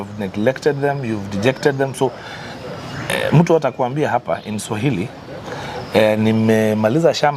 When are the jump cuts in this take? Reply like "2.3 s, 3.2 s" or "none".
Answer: none